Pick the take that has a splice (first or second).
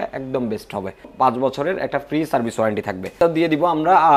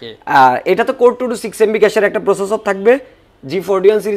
first